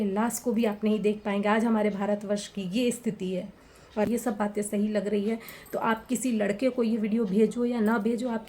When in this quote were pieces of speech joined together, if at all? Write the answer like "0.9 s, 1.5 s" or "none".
4.1 s